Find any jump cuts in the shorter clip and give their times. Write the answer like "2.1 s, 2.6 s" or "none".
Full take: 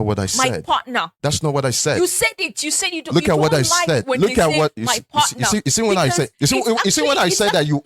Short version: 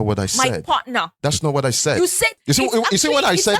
2.4 s